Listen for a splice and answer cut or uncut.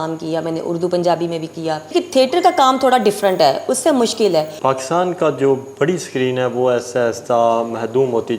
cut